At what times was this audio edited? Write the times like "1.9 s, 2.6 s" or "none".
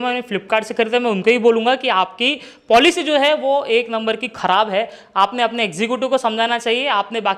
none